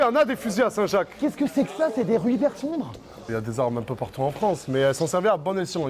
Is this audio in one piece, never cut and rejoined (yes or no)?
yes